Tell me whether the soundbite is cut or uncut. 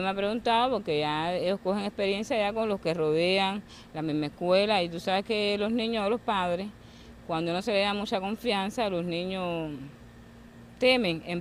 uncut